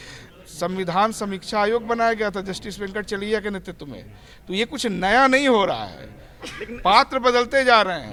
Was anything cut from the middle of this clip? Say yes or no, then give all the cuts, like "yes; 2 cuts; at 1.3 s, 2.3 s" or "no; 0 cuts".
no; 0 cuts